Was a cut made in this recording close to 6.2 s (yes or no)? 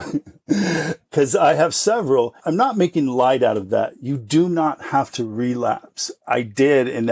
yes